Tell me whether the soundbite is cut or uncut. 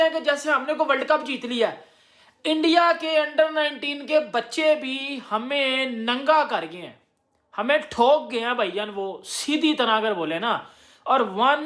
uncut